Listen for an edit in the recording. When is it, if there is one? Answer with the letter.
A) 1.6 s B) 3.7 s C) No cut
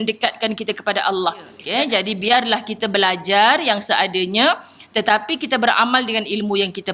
A